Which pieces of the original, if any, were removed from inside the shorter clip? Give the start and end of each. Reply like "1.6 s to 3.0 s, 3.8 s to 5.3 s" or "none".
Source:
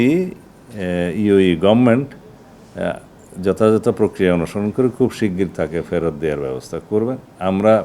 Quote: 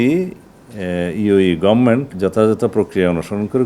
2.1 s to 3.3 s